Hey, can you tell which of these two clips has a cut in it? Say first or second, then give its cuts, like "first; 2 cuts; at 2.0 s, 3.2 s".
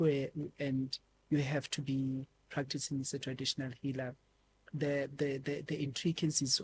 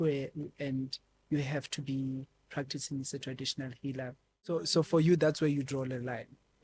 second; 1 cut; at 4.5 s